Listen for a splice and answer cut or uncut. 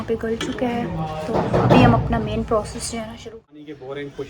cut